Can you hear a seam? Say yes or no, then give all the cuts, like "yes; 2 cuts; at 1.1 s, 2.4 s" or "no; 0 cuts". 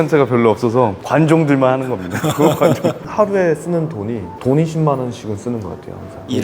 yes; 1 cut; at 3.0 s